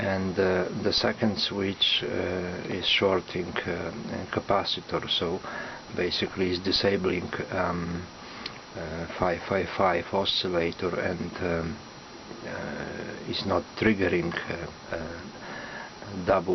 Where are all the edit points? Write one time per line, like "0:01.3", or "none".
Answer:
0:04.0